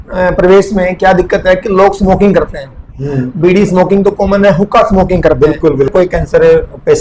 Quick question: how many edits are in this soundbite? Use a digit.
1